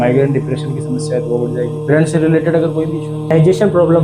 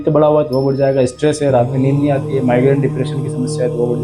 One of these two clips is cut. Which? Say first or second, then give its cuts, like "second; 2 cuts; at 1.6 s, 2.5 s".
first; 1 cut; at 3.0 s